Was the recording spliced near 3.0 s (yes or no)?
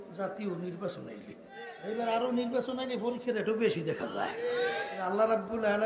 no